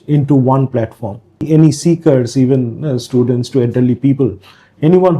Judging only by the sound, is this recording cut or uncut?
cut